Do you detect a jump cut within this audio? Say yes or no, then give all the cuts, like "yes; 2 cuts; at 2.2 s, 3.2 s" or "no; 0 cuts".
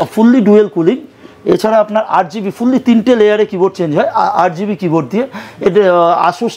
no; 0 cuts